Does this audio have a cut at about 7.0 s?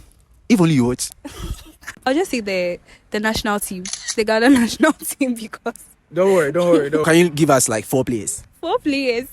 no; 1 cut; at 1.8 s

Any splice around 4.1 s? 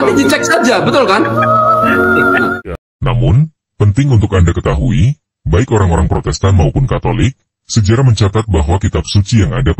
no; 1 cut; at 2.6 s

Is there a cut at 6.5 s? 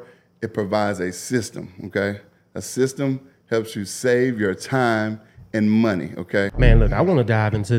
yes; 1 cut; at 6.5 s

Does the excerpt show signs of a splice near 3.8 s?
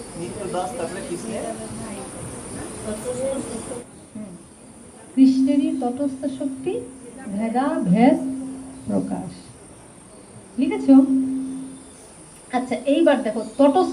yes; 1 cut; at 3.8 s

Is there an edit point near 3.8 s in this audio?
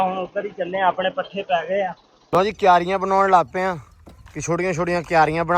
no; 1 cut; at 2.1 s

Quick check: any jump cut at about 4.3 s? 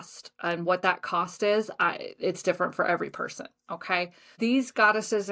yes; 1 cut; at 4.3 s

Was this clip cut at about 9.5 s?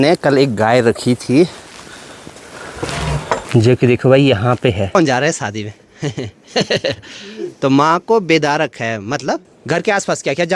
yes; 3 cuts; at 3.5 s, 4.9 s, 9.5 s

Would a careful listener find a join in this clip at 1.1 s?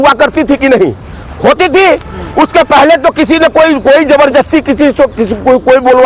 no; 0 cuts

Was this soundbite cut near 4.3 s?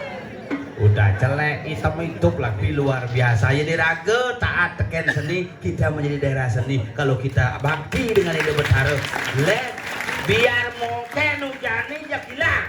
no; 1 cut; at 2.6 s

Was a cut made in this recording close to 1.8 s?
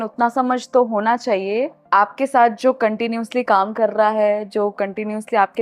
yes; 1 cut; at 1.8 s

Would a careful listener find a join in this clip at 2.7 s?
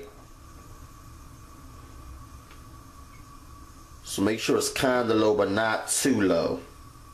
yes; 1 cut; at 2.7 s

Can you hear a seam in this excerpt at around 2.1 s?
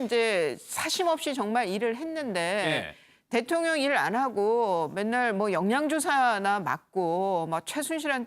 yes; 1 cut; at 2.1 s

